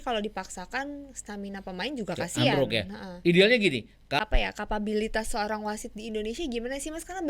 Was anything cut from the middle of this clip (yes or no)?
yes